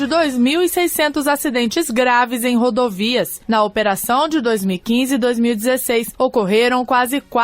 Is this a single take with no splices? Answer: no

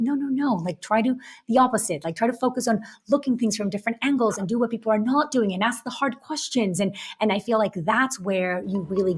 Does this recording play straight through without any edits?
yes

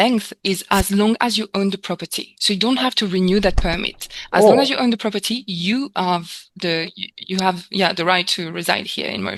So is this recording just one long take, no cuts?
yes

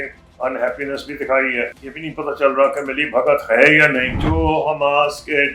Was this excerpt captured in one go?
no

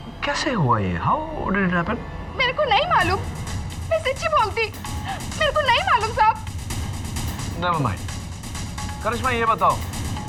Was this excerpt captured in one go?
yes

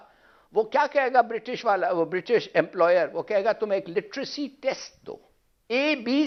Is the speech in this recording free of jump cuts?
yes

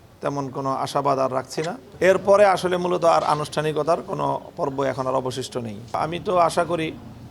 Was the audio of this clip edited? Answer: yes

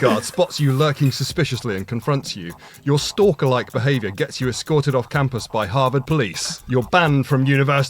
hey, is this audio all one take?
no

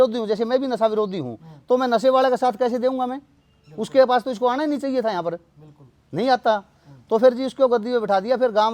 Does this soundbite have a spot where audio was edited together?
no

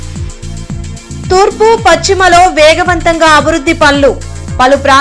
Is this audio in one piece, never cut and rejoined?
yes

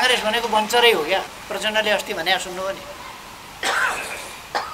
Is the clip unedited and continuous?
no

